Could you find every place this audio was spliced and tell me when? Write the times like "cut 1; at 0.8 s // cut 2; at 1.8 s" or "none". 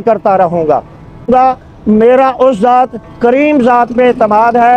cut 1; at 1.3 s